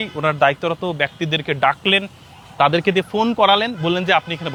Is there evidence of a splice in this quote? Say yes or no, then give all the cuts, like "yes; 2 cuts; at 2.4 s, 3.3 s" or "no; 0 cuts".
no; 0 cuts